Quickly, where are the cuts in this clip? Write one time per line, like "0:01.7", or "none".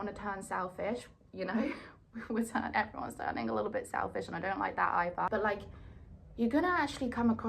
0:05.3